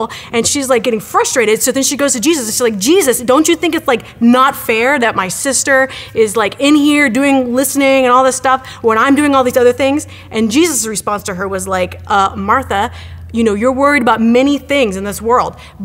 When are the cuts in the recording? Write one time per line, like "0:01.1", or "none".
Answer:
none